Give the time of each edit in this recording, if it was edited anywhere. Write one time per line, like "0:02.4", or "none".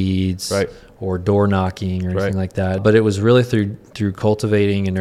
0:02.8